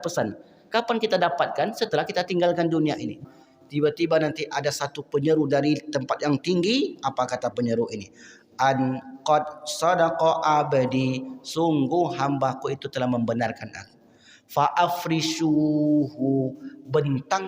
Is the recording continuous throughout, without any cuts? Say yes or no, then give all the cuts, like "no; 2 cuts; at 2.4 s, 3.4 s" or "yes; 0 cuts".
no; 1 cut; at 3.2 s